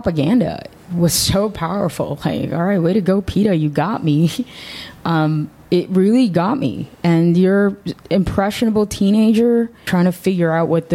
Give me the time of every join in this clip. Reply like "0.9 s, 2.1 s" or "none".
9.9 s